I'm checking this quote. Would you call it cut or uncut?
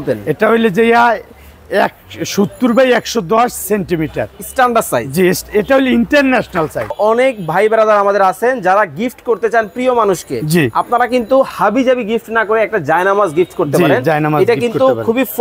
cut